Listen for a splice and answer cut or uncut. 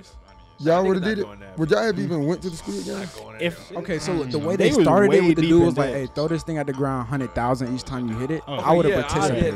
uncut